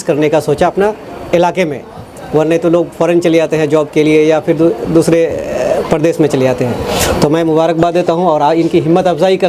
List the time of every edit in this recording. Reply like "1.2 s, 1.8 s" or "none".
none